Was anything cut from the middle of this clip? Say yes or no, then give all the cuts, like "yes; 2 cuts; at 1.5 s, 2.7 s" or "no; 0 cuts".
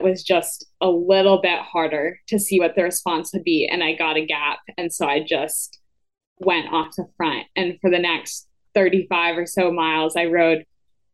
no; 0 cuts